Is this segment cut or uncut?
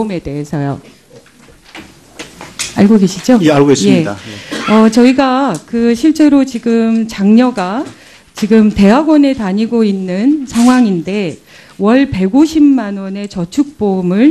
cut